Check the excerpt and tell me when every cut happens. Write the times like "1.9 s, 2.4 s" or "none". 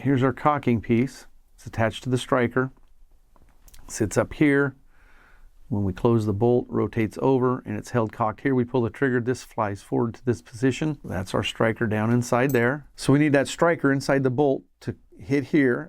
11.0 s, 12.9 s